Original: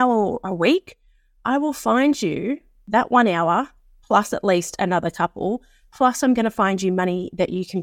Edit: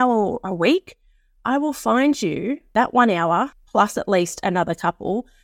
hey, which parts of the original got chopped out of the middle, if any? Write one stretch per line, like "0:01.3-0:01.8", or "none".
0:02.6-0:02.8
0:03.8-0:03.9